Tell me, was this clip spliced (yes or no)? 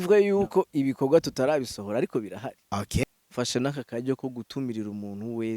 yes